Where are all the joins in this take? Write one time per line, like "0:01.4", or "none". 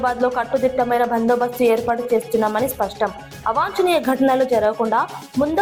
none